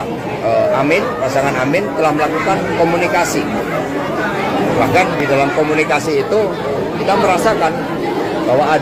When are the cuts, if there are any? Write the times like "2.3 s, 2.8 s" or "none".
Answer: none